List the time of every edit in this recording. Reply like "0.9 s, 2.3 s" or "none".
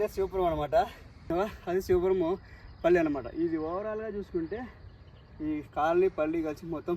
1.3 s